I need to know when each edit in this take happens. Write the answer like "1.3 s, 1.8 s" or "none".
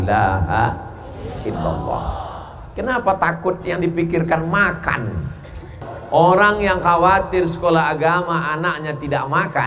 5.9 s